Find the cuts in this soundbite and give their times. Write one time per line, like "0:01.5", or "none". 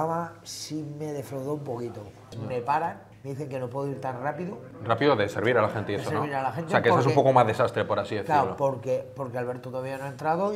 0:02.4